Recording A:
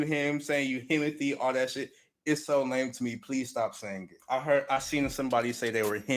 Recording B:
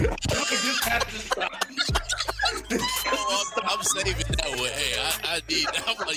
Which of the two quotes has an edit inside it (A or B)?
A